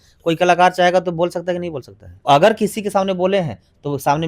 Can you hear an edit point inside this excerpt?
yes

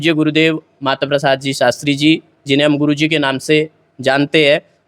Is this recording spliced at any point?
no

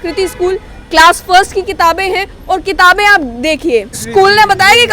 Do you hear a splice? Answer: yes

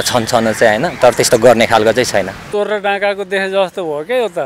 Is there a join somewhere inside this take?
yes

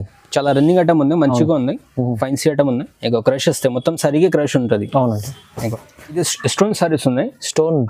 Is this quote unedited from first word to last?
no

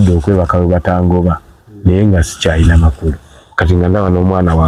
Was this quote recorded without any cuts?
yes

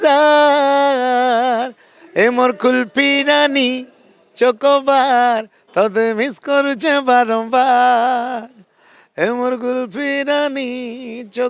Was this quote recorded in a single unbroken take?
yes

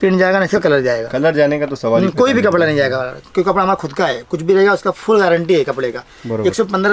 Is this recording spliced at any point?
no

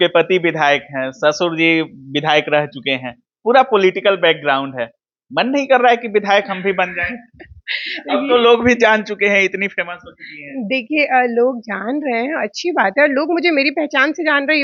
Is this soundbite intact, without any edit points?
yes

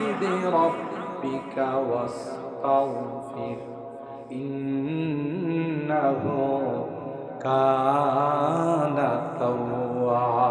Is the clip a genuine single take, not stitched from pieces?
yes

